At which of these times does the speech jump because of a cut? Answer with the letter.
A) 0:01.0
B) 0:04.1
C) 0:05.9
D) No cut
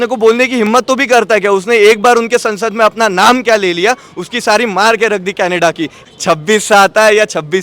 C